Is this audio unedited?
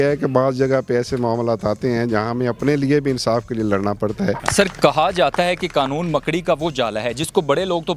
no; 1 cut; at 4.4 s

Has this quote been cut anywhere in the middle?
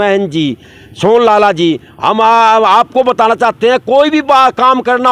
no; 0 cuts

